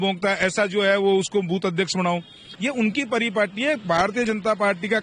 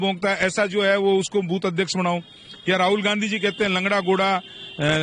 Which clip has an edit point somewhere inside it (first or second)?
first